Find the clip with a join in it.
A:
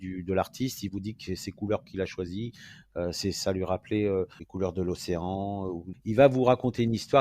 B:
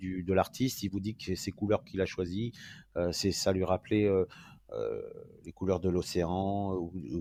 A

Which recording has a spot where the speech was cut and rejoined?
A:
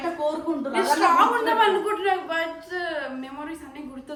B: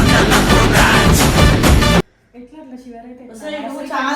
B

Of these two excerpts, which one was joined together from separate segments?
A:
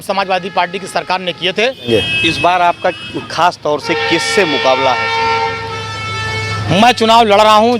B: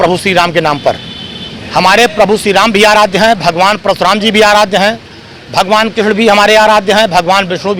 A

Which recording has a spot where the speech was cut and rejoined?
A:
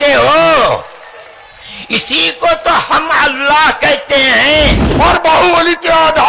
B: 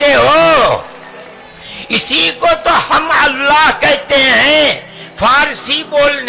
A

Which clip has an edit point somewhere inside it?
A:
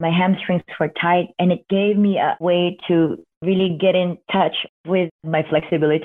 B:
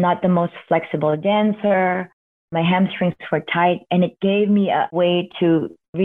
A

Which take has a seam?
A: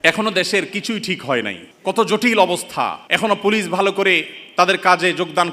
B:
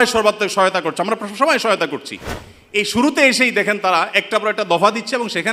A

